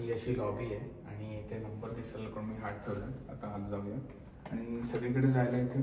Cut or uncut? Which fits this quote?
uncut